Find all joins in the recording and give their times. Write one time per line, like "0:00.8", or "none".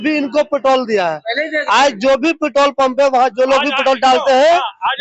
none